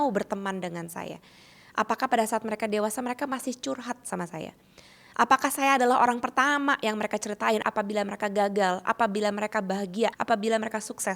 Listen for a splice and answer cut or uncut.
cut